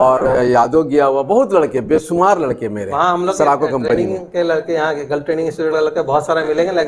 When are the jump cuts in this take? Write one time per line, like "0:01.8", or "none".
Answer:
none